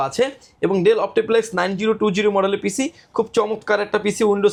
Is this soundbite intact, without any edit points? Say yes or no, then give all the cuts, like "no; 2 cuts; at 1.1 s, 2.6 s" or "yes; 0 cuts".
yes; 0 cuts